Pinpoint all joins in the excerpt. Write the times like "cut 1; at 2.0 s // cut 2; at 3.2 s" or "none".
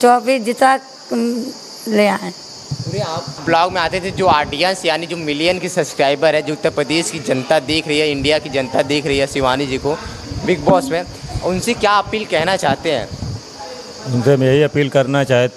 cut 1; at 3.3 s